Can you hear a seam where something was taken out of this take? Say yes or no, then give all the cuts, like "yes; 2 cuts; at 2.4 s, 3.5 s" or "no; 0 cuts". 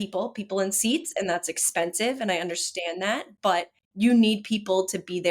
yes; 1 cut; at 3.8 s